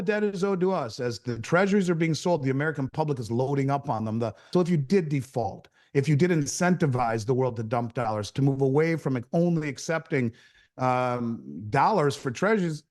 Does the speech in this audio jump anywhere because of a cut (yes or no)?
yes